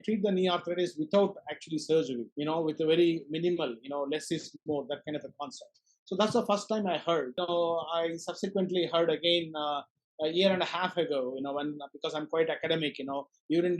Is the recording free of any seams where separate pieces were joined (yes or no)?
no